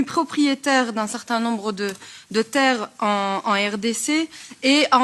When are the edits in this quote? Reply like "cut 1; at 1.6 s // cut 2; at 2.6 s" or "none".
none